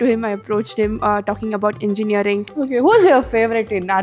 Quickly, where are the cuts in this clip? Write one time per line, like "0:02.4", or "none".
0:02.5